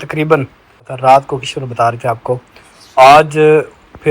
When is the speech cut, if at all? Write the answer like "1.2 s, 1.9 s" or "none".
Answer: 0.9 s